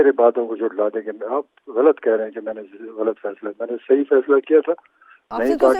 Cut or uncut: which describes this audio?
uncut